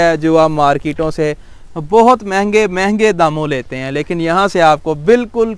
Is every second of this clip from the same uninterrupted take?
yes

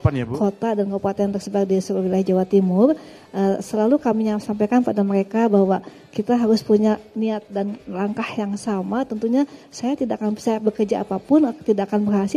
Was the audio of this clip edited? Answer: no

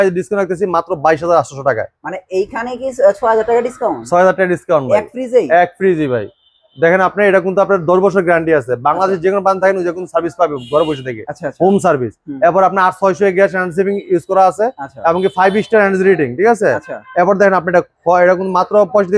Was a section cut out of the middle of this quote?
no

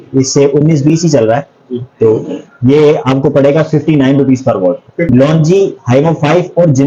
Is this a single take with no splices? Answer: no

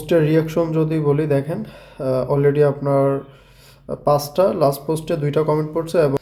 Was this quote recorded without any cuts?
yes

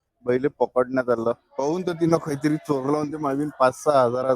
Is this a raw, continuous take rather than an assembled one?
yes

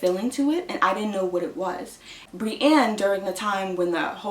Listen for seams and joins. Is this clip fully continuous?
no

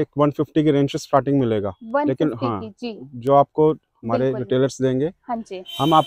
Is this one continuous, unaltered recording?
yes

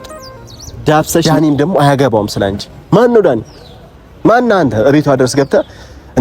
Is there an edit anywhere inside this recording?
yes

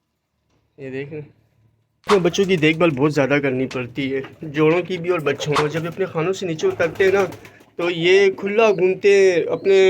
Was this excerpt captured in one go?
no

